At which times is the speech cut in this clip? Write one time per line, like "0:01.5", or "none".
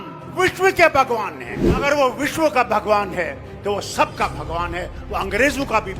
0:01.6